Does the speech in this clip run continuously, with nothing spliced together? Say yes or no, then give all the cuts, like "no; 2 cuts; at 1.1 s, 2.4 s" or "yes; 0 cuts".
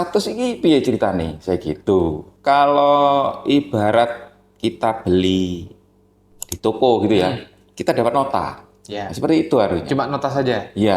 no; 1 cut; at 2.3 s